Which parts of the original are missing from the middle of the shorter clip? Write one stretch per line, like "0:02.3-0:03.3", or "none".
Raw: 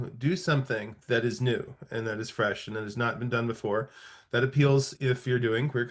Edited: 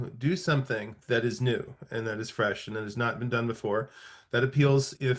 none